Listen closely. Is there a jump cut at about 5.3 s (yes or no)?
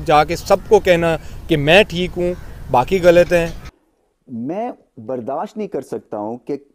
no